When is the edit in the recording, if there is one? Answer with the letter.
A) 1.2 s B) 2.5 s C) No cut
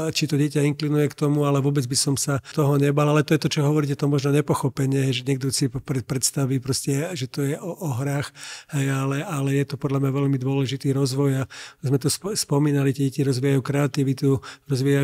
B